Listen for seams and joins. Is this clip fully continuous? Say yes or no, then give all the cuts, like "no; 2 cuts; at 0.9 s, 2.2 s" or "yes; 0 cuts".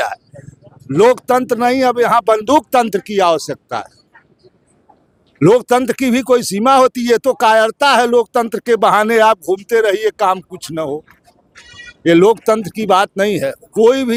yes; 0 cuts